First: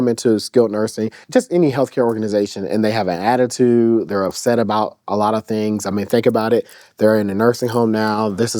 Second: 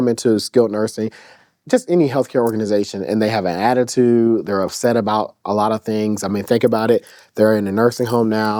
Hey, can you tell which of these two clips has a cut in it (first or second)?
first